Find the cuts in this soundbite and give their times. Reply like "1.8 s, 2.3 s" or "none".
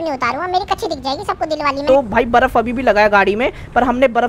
1.8 s